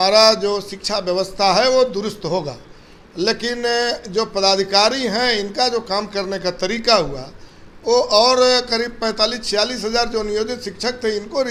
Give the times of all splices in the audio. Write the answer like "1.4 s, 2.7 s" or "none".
none